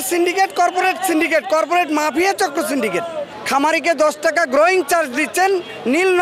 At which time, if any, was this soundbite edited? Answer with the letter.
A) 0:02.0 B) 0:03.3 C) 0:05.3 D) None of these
B